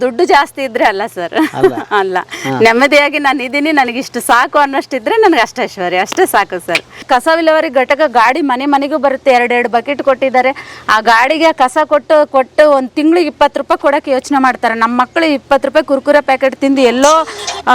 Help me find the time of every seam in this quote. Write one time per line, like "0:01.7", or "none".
0:07.0